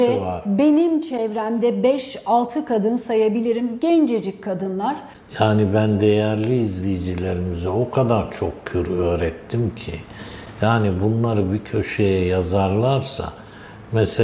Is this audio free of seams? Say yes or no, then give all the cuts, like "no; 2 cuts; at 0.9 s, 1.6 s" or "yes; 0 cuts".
yes; 0 cuts